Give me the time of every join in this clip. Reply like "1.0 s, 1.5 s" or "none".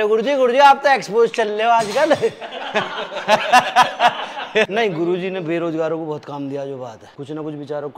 4.7 s, 7.1 s